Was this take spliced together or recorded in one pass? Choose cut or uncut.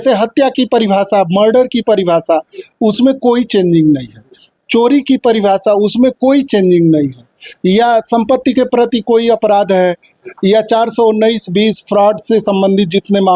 uncut